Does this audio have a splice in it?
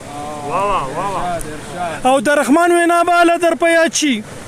no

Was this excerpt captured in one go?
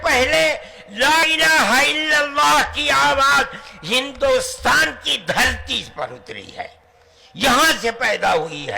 no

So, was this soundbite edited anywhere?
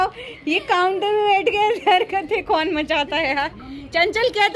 no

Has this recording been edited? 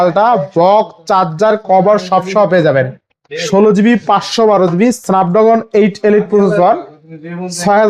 no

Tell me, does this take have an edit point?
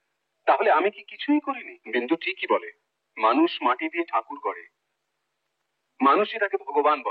yes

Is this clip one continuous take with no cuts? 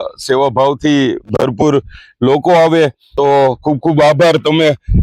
no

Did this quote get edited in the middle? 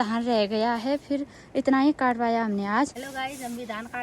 yes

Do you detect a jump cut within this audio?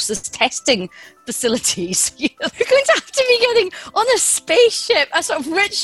yes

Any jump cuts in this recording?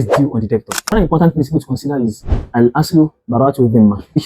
yes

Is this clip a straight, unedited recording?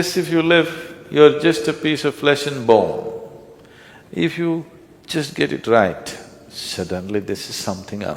yes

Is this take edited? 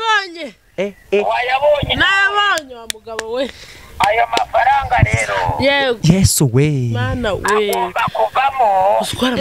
no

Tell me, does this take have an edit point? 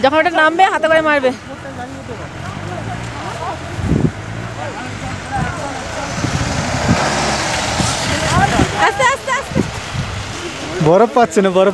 yes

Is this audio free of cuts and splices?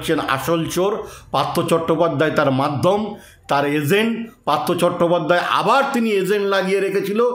yes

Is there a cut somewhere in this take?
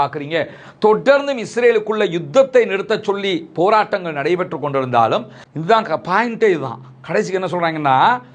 yes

